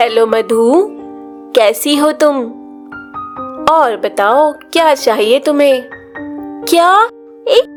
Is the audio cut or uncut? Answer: uncut